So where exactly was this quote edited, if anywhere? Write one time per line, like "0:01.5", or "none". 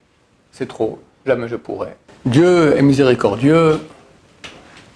0:02.0